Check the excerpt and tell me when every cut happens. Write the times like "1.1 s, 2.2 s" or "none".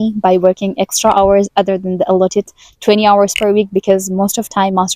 none